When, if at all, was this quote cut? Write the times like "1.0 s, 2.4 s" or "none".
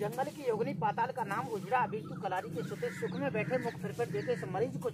none